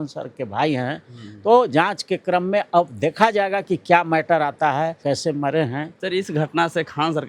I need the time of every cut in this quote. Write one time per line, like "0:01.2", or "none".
0:05.9